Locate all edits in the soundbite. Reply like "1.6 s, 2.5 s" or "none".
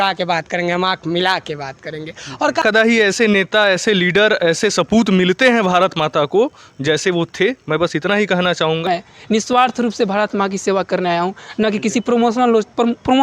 2.6 s, 8.9 s